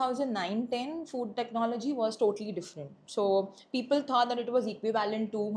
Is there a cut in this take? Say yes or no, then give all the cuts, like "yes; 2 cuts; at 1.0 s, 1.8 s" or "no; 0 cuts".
no; 0 cuts